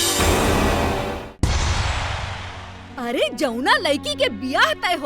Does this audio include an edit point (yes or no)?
yes